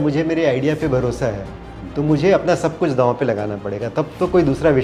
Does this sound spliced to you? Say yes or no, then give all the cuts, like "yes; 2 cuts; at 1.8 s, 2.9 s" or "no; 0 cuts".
no; 0 cuts